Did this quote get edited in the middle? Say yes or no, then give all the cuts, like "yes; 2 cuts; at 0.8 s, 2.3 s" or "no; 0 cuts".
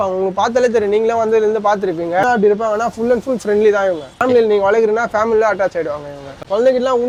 no; 0 cuts